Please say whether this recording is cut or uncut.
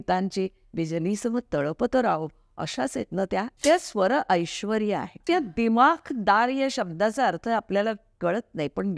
cut